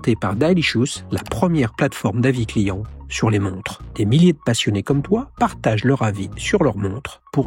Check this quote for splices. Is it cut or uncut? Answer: uncut